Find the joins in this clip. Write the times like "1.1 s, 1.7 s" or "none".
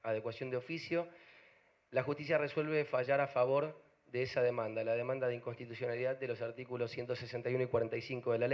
4.1 s